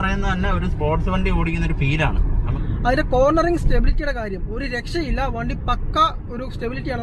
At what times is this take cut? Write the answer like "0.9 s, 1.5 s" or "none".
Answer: 2.5 s

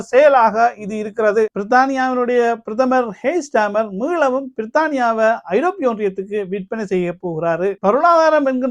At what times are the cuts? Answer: 1.6 s, 7.8 s

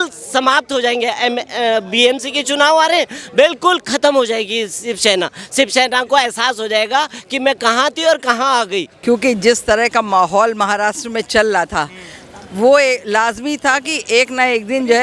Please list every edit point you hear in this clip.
8.9 s

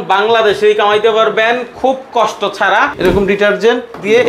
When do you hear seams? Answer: 2.9 s

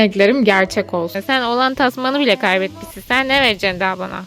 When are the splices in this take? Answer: 1.2 s

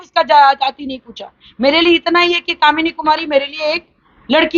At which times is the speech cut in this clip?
none

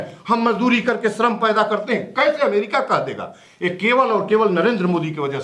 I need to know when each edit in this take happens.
none

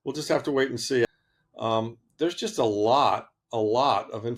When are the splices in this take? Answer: 1.1 s

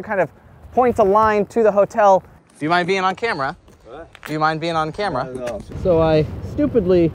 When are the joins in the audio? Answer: 2.4 s, 5.6 s

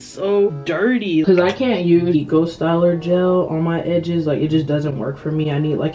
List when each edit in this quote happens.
1.2 s, 2.1 s

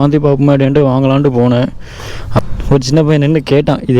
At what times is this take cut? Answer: 2.4 s

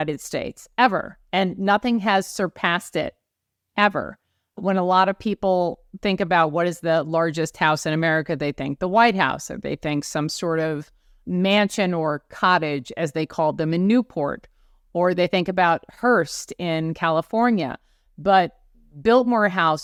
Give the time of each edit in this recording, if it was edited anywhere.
none

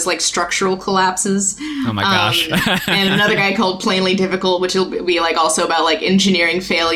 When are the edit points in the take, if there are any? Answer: none

